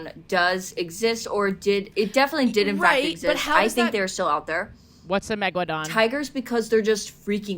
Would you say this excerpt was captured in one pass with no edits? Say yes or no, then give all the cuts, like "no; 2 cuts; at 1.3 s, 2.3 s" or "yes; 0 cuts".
no; 1 cut; at 5.9 s